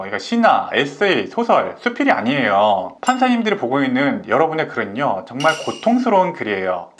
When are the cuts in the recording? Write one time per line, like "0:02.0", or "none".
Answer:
none